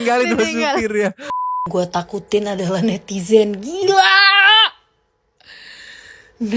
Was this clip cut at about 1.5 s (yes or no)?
yes